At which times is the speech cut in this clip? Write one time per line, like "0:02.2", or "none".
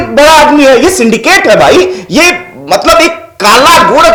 none